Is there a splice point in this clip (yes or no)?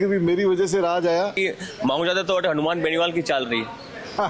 yes